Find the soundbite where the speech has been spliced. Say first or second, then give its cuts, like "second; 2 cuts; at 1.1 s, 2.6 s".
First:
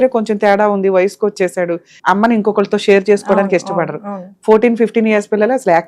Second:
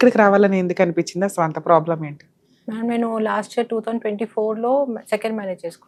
first; 1 cut; at 1.9 s